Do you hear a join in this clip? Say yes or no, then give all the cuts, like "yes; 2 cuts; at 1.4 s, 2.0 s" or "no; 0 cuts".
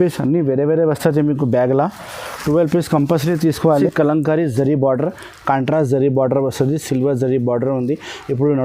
yes; 1 cut; at 3.7 s